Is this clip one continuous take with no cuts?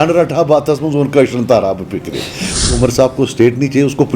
no; 1 cut; at 2.7 s

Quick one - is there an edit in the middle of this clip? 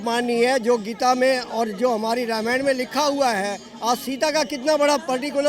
no; 0 cuts

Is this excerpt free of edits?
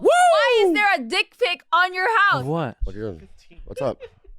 yes; 0 cuts

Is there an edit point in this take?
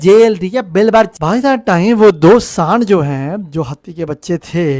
yes; 1 cut; at 1.1 s

